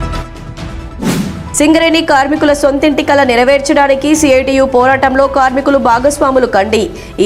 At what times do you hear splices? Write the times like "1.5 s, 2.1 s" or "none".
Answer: 1.1 s